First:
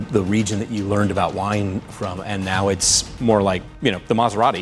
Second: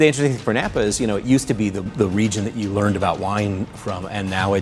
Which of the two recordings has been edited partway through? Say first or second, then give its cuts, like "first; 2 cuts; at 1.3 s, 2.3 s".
first; 1 cut; at 3.7 s